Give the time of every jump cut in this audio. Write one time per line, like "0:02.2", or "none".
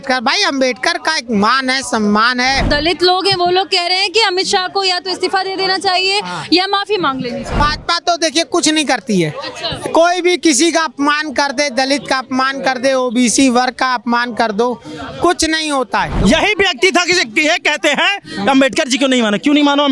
0:02.7
0:07.6
0:16.1

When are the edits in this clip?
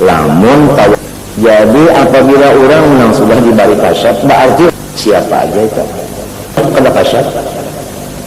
0:00.9
0:04.7
0:06.6

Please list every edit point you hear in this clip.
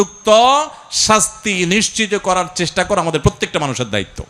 none

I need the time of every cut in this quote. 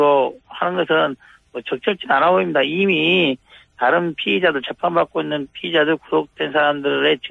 0:03.5

